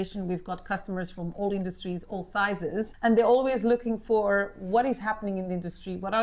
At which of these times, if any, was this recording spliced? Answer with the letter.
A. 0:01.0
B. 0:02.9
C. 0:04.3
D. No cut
B